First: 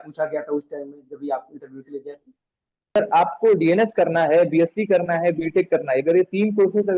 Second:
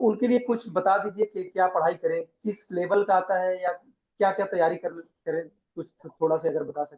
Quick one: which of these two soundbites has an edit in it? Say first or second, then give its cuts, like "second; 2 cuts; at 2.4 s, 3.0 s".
first; 1 cut; at 3.0 s